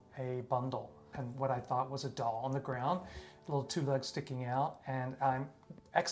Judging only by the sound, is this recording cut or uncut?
cut